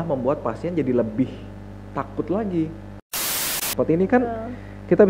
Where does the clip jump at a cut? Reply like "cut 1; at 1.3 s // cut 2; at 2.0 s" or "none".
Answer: cut 1; at 3.5 s